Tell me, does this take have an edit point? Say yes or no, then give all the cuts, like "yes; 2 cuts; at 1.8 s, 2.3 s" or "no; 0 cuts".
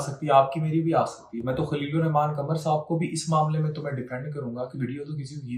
no; 0 cuts